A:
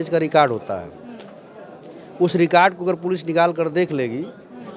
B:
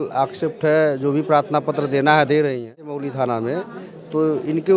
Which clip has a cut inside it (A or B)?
B